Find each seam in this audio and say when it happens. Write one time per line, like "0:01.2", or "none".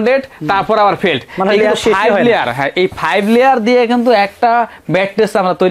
none

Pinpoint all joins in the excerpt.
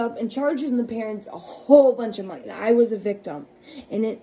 0:02.5

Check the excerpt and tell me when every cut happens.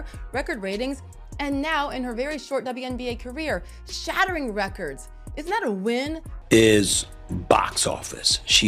0:06.3

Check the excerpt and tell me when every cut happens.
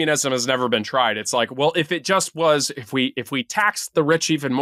none

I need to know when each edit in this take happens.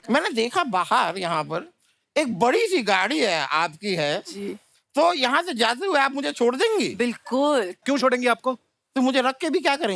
none

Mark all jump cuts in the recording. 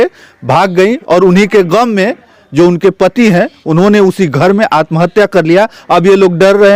none

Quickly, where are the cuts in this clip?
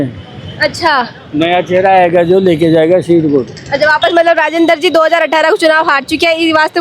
none

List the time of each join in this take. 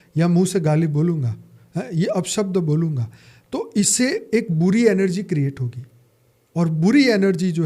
none

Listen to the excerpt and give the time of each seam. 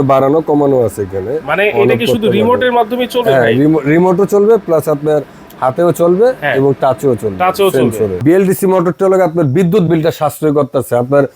0:08.2

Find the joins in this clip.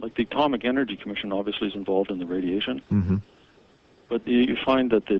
0:02.6

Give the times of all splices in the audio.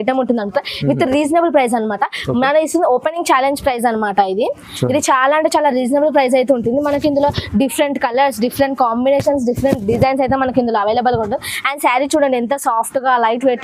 none

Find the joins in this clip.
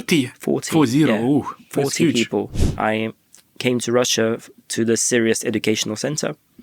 0:02.6

